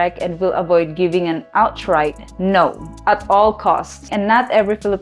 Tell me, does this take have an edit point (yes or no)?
yes